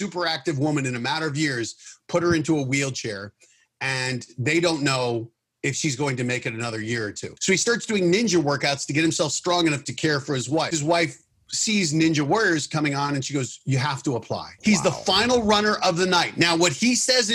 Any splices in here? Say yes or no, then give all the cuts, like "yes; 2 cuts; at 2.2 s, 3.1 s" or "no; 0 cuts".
yes; 3 cuts; at 7.3 s, 10.7 s, 14.4 s